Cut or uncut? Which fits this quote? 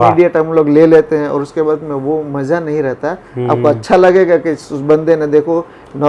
uncut